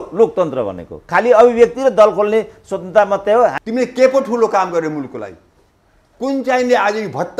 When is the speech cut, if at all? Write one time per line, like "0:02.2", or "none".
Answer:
0:03.6

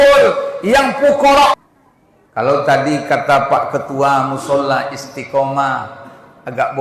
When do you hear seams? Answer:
0:01.6

